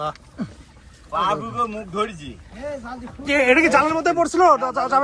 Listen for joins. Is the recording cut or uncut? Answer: uncut